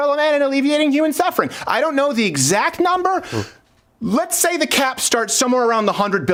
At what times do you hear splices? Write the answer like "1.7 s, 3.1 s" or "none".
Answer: none